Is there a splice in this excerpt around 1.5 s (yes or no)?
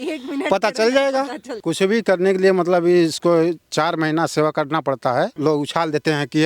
yes